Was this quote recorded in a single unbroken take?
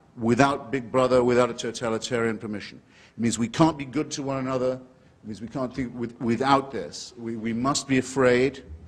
yes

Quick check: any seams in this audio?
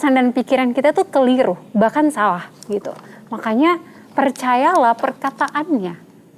no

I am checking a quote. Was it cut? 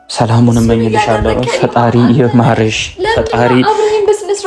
no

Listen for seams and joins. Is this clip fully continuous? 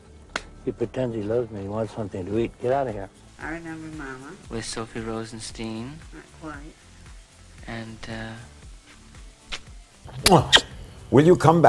yes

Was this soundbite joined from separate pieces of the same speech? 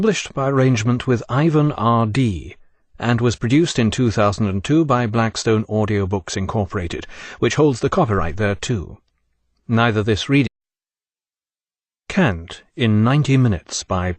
no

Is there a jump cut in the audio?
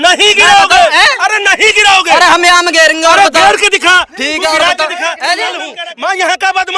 yes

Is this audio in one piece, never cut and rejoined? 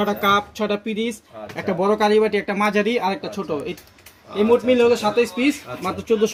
yes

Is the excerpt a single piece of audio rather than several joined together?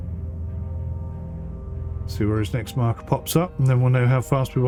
yes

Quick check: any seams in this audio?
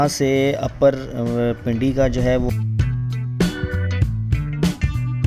yes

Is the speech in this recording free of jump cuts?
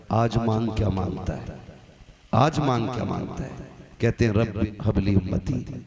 no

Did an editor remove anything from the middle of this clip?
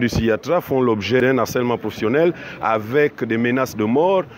yes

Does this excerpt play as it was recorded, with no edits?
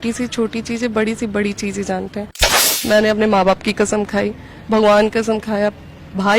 no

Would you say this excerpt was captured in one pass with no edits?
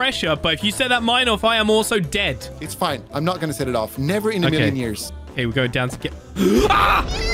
yes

